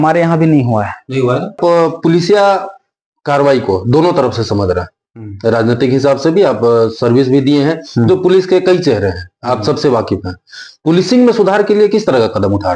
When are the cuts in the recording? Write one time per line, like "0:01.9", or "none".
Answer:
0:01.6